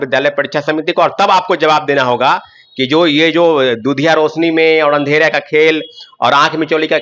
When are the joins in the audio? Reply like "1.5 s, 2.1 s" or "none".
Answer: none